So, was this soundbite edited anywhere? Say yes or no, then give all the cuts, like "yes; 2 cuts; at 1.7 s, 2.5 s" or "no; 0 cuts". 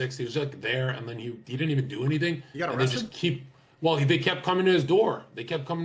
no; 0 cuts